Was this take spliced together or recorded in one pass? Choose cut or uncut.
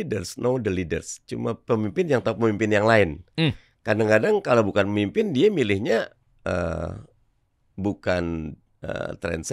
uncut